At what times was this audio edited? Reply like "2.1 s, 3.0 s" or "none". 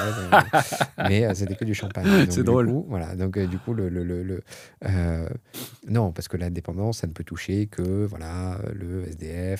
none